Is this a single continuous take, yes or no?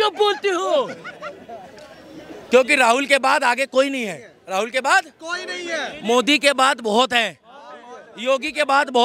yes